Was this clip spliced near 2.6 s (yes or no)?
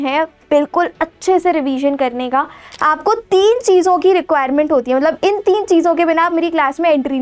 yes